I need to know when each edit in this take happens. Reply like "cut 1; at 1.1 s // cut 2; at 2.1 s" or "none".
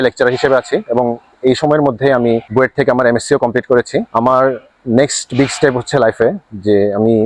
none